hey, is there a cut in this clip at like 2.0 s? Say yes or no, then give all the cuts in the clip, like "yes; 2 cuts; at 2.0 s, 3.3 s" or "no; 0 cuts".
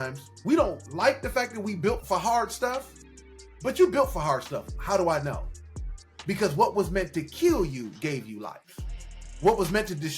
yes; 1 cut; at 2.0 s